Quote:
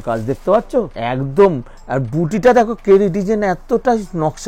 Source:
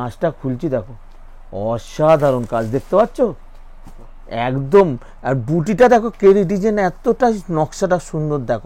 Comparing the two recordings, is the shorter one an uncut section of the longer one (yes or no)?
no